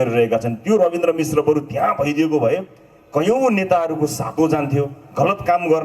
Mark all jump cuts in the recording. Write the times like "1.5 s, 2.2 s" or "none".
none